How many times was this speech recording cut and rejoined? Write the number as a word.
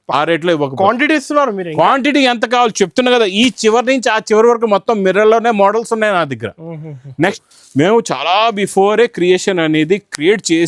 one